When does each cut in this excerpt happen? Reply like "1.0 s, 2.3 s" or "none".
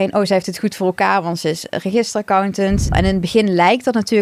2.9 s